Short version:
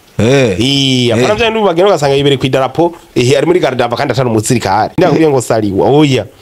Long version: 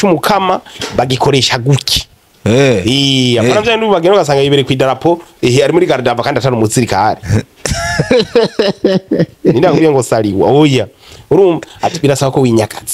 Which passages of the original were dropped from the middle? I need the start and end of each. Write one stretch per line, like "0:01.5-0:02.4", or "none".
0:07.2-0:09.6